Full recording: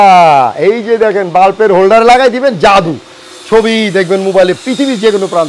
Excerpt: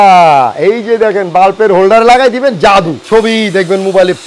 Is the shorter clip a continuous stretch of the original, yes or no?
no